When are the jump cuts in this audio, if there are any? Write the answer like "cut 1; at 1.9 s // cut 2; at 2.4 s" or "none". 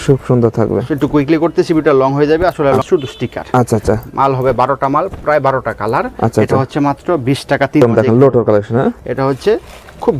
cut 1; at 2.8 s // cut 2; at 7.8 s